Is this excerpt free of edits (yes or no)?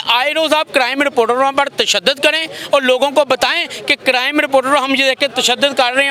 yes